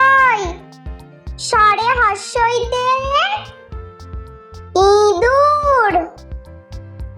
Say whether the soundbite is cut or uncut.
uncut